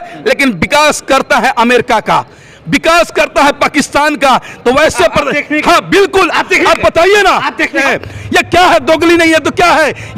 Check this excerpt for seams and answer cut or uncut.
cut